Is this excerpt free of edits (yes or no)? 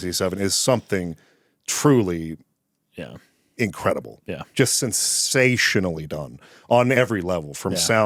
yes